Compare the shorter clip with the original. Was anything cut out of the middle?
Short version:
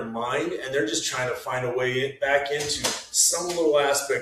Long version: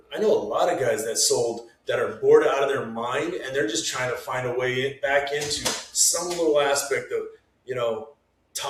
no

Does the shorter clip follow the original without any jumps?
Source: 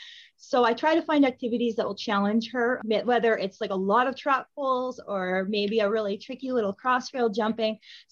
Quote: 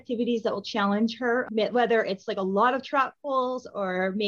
yes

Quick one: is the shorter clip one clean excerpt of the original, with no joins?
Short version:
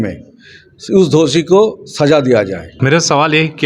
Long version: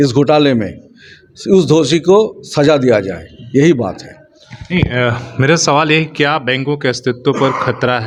no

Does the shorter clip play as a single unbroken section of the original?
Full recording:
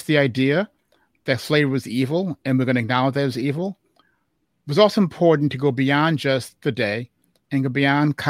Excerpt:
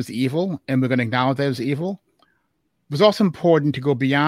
yes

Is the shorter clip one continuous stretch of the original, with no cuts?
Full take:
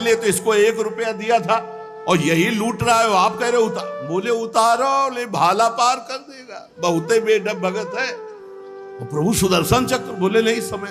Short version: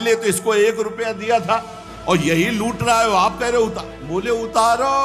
yes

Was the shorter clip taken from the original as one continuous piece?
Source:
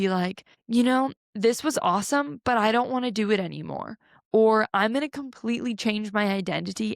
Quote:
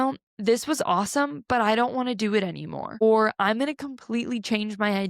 no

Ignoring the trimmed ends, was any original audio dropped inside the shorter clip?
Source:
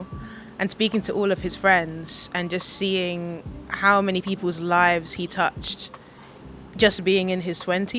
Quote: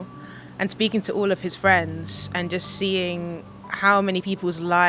no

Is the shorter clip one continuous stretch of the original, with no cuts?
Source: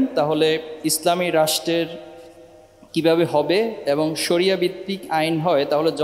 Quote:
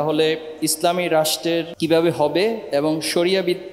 no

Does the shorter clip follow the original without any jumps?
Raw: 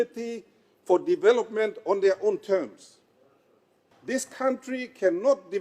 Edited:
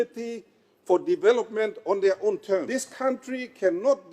no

